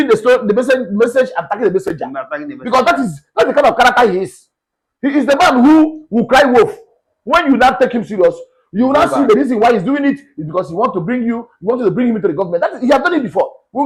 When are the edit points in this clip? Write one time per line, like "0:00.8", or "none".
none